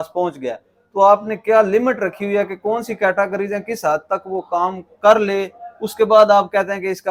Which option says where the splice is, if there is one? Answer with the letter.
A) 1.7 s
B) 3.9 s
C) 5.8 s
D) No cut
D